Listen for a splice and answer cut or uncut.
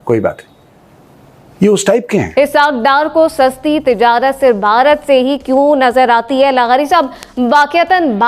cut